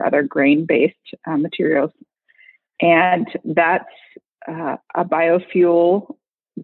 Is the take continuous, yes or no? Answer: yes